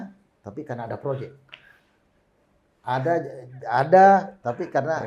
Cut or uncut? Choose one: uncut